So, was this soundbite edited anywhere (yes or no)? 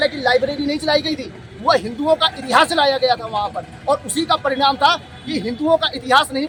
no